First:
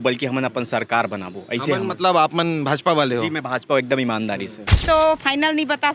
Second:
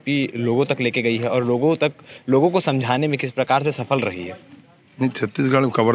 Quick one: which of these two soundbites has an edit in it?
first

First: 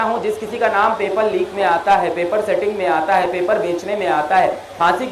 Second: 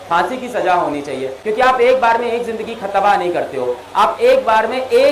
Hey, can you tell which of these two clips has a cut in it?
second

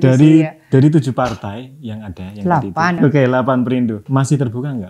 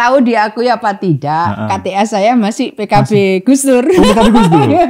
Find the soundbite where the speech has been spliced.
first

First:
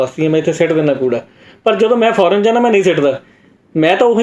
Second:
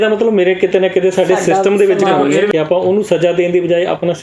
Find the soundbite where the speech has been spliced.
second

